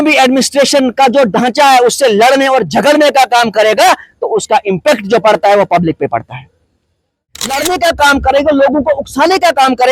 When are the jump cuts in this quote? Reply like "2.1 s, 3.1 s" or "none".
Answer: 7.2 s